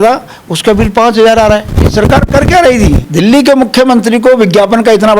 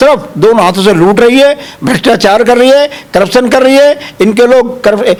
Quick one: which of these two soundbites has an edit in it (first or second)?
first